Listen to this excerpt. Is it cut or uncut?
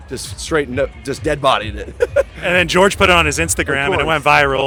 uncut